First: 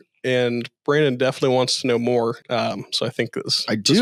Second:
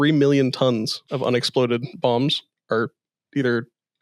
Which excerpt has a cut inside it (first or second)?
second